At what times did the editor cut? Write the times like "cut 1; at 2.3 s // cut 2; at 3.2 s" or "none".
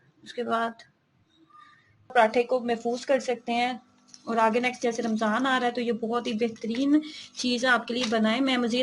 cut 1; at 2.1 s